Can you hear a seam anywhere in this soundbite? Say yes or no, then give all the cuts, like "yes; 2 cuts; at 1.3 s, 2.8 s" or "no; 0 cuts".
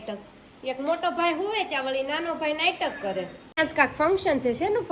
yes; 1 cut; at 3.6 s